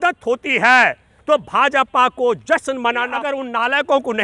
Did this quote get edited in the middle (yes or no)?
yes